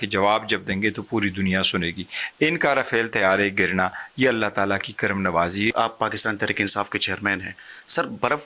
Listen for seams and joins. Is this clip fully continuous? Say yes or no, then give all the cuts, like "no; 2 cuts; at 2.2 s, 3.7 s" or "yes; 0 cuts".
no; 1 cut; at 5.7 s